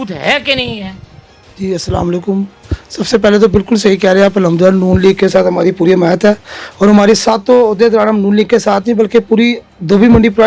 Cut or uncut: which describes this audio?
uncut